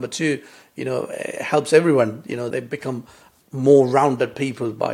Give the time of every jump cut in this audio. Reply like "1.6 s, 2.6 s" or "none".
2.5 s